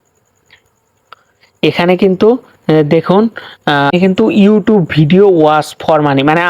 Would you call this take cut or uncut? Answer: cut